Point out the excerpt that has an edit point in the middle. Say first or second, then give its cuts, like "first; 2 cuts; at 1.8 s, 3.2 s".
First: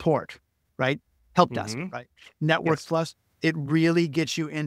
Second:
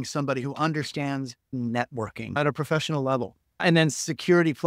second; 3 cuts; at 1.4 s, 2.4 s, 3.6 s